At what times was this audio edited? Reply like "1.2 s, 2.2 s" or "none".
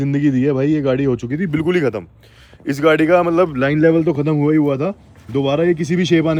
none